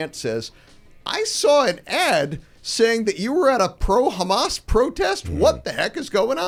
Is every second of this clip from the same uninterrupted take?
yes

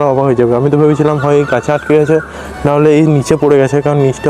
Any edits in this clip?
no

